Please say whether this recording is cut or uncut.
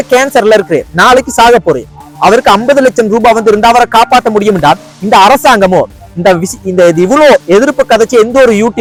uncut